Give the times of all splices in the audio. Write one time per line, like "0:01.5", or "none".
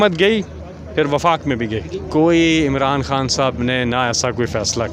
0:01.9